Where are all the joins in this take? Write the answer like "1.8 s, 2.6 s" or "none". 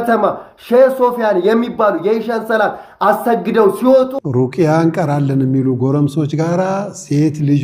4.2 s